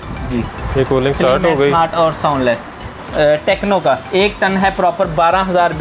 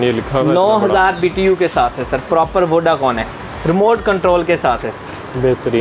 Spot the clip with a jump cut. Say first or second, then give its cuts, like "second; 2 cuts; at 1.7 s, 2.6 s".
first; 1 cut; at 3.0 s